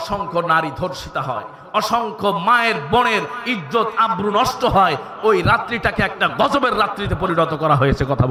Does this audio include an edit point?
no; 0 cuts

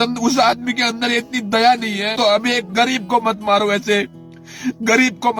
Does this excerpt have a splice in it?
yes; 1 cut; at 2.2 s

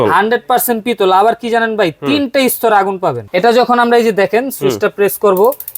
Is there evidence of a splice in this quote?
yes; 1 cut; at 3.2 s

